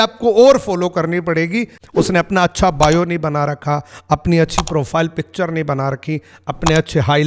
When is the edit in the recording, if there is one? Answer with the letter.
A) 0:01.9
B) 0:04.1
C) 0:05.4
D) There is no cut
A